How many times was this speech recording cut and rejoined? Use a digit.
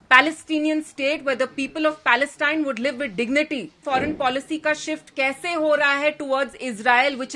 1